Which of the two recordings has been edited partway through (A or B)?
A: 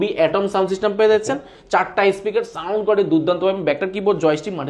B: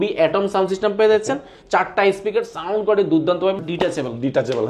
B